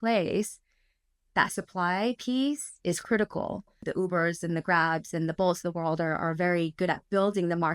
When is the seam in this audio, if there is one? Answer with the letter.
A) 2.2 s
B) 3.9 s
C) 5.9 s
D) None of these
B